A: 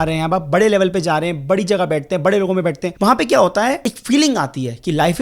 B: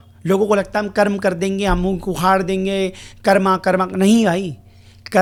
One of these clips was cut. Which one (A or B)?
A